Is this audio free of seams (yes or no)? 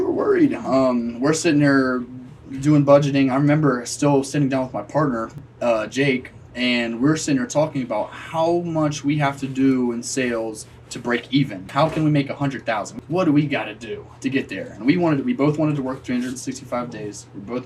no